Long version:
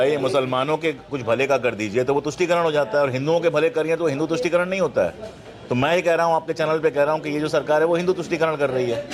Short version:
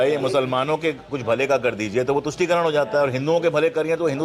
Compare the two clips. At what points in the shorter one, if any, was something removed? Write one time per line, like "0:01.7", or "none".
none